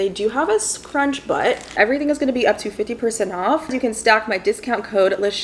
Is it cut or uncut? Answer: cut